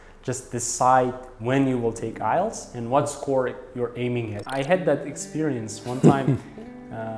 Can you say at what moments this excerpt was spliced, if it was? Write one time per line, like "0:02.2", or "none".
0:04.4